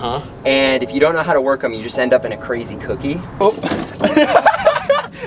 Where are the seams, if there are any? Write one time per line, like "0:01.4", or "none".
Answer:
0:03.3